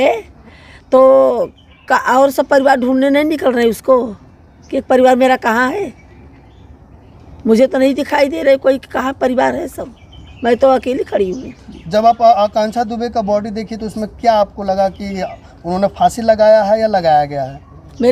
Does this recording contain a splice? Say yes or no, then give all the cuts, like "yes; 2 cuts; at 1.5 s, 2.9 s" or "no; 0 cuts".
no; 0 cuts